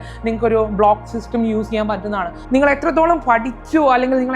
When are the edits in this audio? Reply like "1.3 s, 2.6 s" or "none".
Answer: 2.3 s